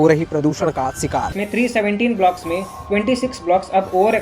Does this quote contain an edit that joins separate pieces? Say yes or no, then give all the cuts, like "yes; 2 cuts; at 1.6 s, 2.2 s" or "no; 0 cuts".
yes; 1 cut; at 1.3 s